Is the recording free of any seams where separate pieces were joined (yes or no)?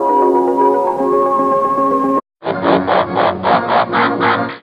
yes